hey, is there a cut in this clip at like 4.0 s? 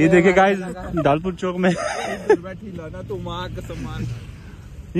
no; 0 cuts

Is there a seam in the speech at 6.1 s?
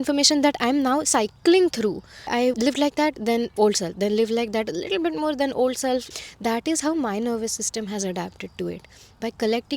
yes; 2 cuts; at 2.4 s, 6.1 s

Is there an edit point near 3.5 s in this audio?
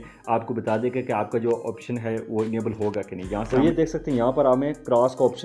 yes; 1 cut; at 3.5 s

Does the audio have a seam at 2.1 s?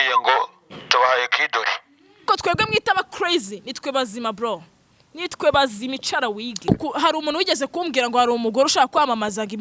yes; 2 cuts; at 2.1 s, 6.7 s

